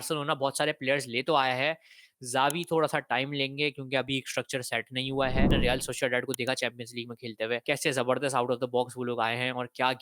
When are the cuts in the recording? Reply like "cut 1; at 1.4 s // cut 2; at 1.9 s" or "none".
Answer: cut 1; at 5.5 s // cut 2; at 7.6 s